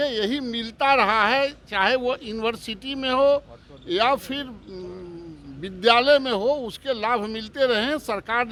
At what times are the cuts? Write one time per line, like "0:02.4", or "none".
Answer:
none